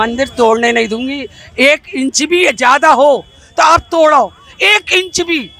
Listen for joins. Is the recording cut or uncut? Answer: uncut